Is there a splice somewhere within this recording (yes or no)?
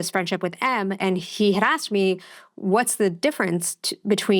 yes